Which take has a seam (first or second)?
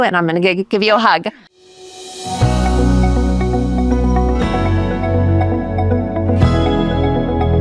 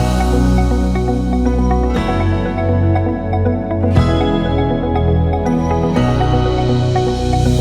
first